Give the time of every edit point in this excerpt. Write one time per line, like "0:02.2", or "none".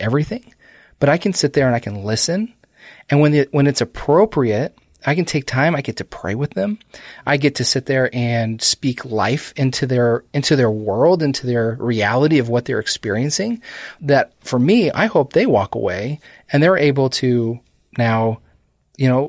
0:13.9